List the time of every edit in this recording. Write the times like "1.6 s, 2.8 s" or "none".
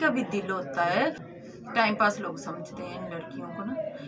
1.3 s